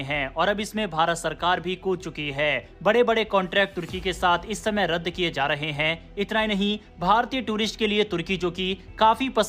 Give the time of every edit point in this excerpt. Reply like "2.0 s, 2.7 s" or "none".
none